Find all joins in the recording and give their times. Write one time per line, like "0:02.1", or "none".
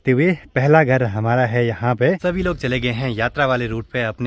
0:02.2